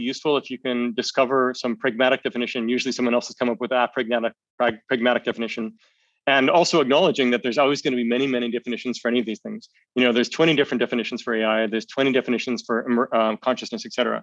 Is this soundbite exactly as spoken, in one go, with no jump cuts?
yes; 0 cuts

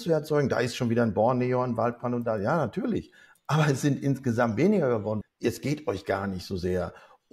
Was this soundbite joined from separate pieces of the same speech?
yes; 1 cut; at 5.2 s

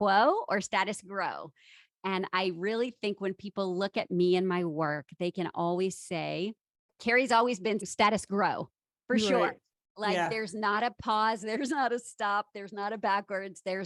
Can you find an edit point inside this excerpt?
no; 0 cuts

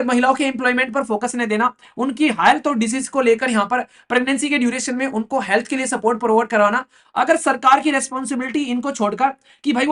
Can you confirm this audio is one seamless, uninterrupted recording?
yes; 0 cuts

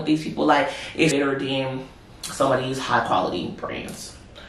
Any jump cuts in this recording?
yes; 1 cut; at 1.1 s

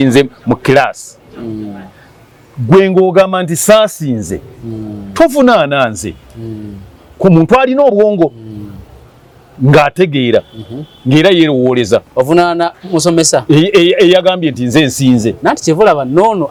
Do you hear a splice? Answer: no; 0 cuts

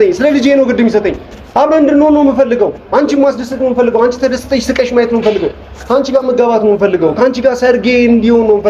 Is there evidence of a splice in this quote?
no; 0 cuts

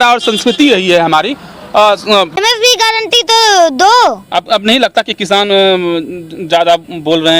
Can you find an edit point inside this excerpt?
yes; 1 cut; at 2.4 s

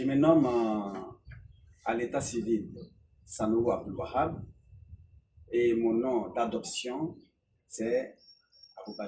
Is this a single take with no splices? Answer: yes; 0 cuts

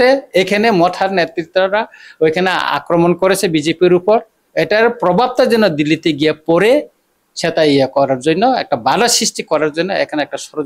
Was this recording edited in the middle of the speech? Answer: no; 0 cuts

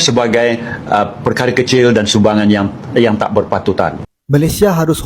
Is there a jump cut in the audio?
yes; 1 cut; at 4.1 s

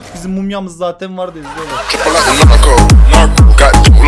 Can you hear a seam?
no; 0 cuts

